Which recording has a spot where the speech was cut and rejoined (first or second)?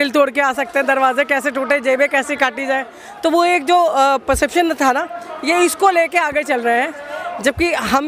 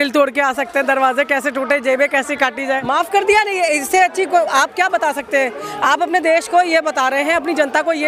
second